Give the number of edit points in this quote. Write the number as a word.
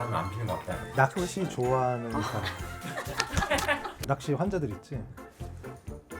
two